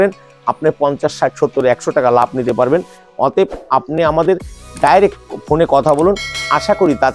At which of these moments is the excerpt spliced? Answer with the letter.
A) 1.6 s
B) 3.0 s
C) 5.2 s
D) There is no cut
D